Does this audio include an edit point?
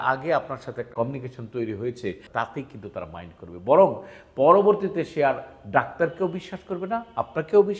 yes; 2 cuts; at 0.9 s, 2.2 s

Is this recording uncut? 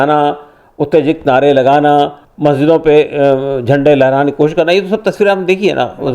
no; 1 cut; at 2.2 s

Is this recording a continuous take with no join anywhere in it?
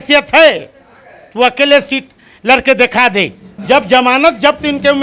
no; 1 cut; at 3.5 s

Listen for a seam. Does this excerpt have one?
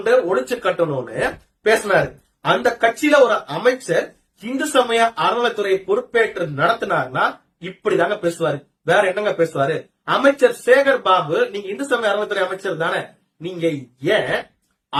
no; 0 cuts

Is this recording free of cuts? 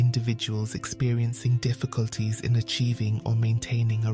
yes; 0 cuts

